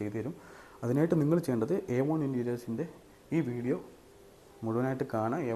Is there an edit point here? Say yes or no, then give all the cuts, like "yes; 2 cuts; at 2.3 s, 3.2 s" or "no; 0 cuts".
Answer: no; 0 cuts